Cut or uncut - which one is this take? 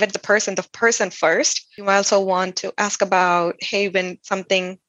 cut